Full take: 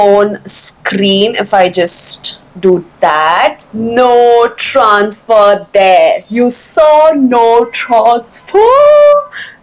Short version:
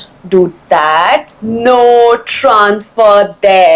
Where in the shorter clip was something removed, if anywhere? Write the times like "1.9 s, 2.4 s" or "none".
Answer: none